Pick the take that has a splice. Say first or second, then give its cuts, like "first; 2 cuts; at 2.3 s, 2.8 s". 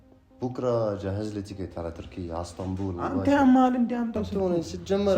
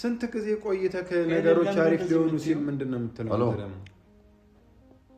first; 1 cut; at 4.3 s